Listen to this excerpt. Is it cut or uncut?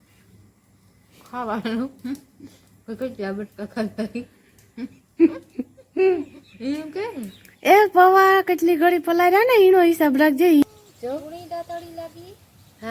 cut